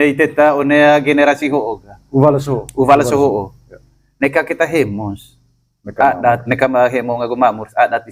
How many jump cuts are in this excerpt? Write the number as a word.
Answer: one